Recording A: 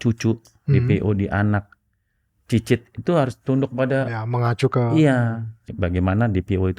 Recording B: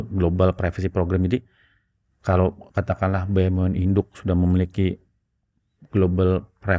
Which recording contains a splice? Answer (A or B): A